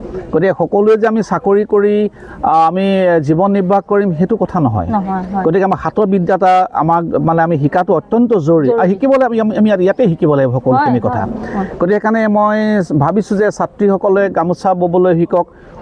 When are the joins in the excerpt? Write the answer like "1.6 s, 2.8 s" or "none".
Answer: none